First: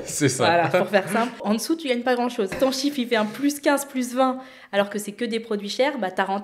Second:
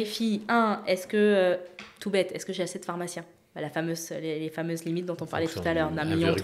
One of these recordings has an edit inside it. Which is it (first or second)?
first